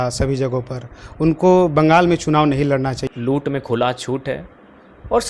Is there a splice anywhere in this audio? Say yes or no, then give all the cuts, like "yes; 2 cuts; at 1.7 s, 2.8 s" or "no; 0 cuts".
yes; 1 cut; at 3.0 s